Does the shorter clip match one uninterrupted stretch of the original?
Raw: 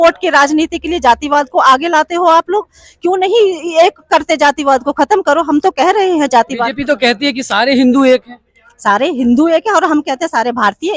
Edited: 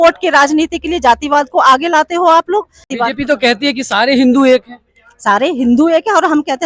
no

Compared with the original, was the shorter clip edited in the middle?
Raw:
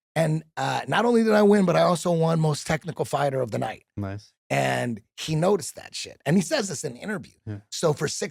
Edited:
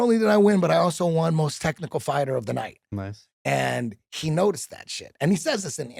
no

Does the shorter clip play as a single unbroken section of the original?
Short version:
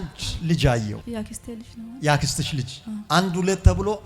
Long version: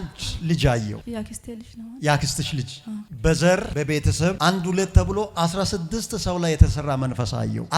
no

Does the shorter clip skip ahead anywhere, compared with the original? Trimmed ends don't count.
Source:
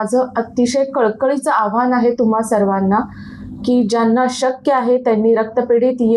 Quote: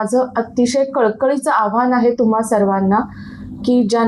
no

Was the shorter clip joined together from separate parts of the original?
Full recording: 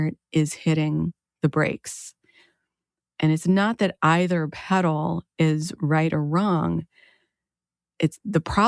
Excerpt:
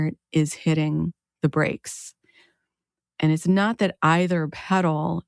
no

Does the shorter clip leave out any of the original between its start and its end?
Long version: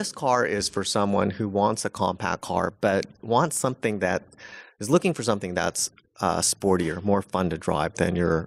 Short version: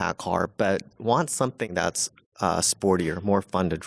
yes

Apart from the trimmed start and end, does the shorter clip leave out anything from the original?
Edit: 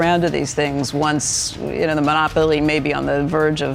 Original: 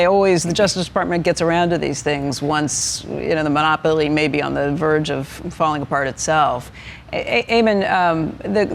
no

